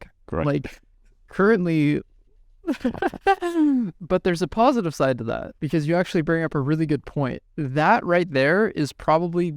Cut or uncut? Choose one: cut